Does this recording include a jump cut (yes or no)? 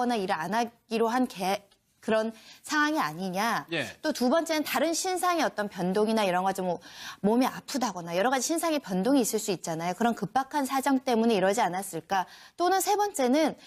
no